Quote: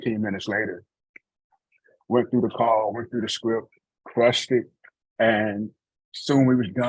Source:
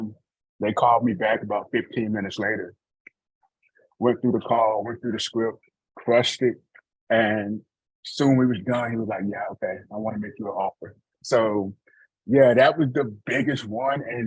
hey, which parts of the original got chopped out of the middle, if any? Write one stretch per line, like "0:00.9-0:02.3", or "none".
none